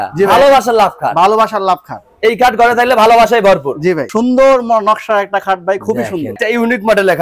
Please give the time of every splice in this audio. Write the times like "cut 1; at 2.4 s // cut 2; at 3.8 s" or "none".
cut 1; at 4.1 s // cut 2; at 6.3 s